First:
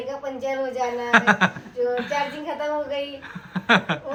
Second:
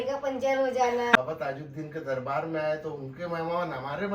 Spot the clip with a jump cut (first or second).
second